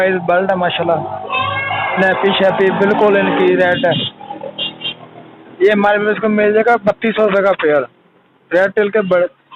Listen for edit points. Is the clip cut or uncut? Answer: uncut